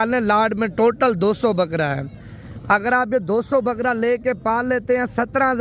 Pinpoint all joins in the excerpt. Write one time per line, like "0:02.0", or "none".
none